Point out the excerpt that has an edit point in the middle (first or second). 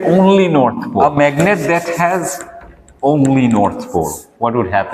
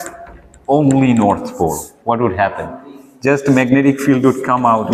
first